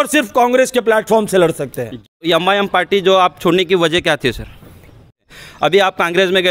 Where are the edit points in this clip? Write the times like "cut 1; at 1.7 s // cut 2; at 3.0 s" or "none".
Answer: cut 1; at 2.2 s // cut 2; at 5.2 s